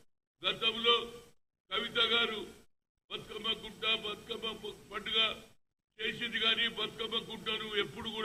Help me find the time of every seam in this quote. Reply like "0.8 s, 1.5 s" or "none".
none